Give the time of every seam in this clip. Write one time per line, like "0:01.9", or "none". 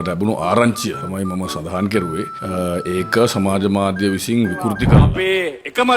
0:04.9

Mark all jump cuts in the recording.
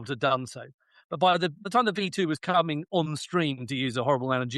0:01.7

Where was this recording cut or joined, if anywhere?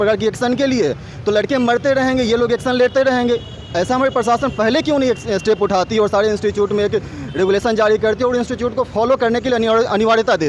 none

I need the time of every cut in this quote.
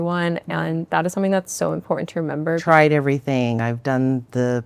0:02.6

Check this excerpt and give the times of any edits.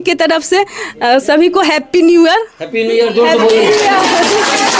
none

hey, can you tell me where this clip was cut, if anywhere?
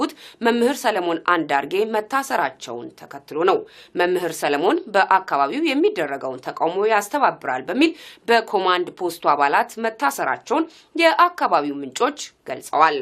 0:02.9

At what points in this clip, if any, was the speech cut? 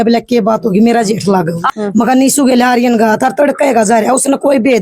0:01.8

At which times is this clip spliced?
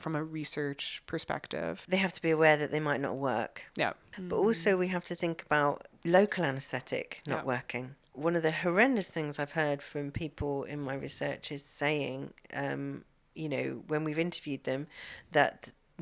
0:01.8
0:04.1
0:05.9
0:08.0

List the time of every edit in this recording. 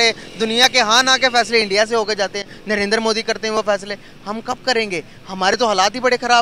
none

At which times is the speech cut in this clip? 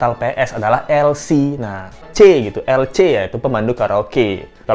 0:02.1

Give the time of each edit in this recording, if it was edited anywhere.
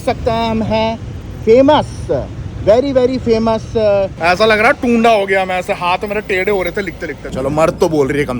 0:04.1
0:07.2

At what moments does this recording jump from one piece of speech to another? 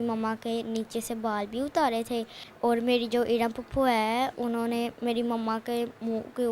0:02.4

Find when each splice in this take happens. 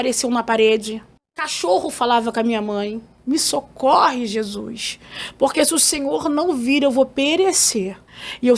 0:03.1

